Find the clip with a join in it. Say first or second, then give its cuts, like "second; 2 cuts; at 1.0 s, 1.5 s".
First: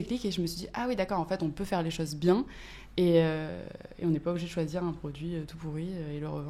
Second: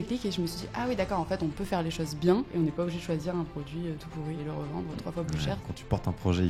second; 3 cuts; at 2.5 s, 4.4 s, 5.7 s